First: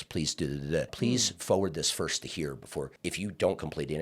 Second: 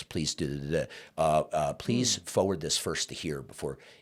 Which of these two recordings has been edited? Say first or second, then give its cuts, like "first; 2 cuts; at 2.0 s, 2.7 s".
first; 2 cuts; at 0.9 s, 2.9 s